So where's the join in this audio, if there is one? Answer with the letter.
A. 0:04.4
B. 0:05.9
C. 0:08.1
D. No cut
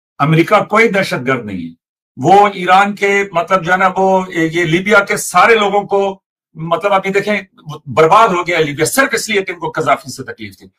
D